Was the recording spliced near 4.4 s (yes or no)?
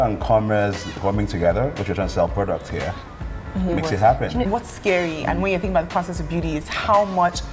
yes